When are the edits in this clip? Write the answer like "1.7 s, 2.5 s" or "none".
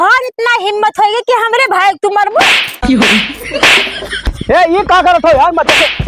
4.3 s